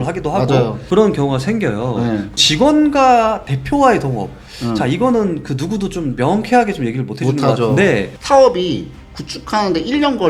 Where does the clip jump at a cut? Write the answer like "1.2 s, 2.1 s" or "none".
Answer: 8.1 s